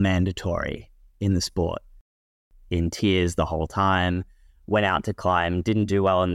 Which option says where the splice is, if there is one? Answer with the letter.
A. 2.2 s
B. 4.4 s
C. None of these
A